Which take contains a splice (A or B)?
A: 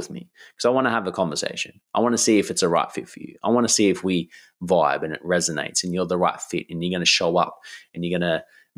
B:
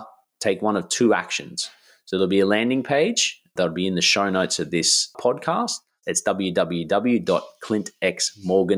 B